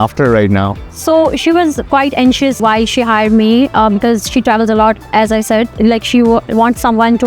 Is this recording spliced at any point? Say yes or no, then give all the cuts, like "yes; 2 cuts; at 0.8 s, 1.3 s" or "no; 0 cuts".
yes; 2 cuts; at 2.6 s, 5.7 s